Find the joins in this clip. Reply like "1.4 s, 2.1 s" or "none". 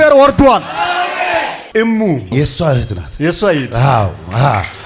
1.6 s

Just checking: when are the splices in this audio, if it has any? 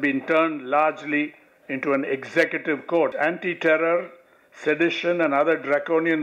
3.1 s

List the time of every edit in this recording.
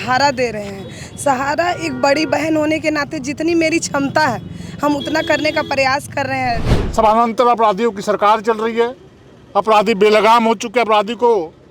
6.7 s

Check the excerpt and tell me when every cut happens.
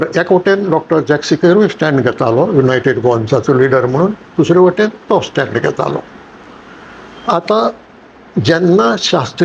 none

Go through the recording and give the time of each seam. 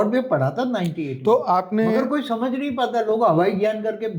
none

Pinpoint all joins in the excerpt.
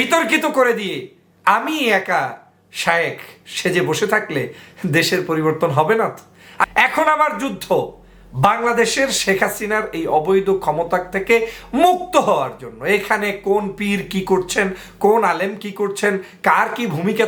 6.7 s

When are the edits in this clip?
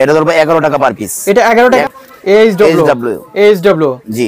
1.8 s

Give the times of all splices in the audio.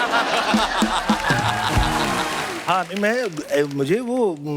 2.5 s

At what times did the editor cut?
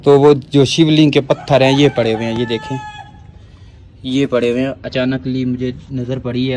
none

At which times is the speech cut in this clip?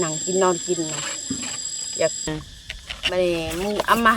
2.3 s

